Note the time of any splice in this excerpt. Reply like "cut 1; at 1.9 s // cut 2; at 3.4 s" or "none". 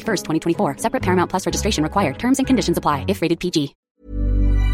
cut 1; at 3.8 s